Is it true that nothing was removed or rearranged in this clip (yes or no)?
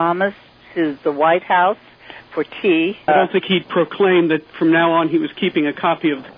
no